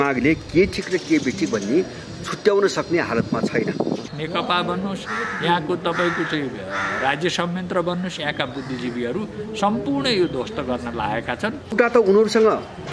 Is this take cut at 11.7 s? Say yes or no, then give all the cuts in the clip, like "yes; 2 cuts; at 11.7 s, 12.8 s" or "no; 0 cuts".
yes; 2 cuts; at 4.1 s, 11.7 s